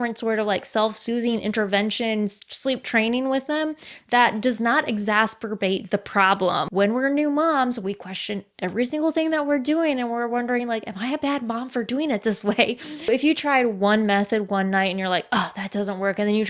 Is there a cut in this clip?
yes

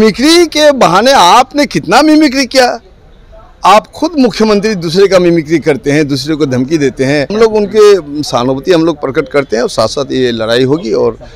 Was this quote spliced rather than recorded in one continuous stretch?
yes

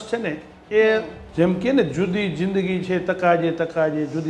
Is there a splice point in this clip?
yes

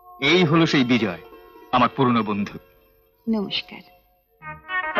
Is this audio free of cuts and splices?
yes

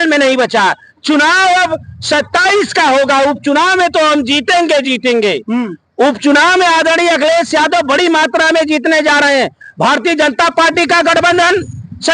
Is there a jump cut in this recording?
no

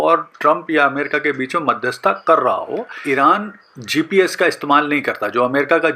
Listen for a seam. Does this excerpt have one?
yes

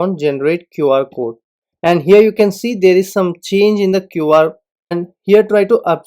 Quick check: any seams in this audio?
yes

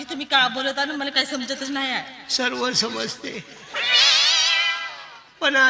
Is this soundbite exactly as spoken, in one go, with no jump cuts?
yes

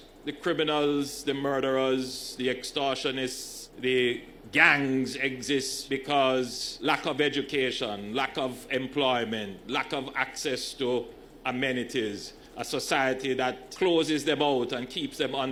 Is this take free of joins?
yes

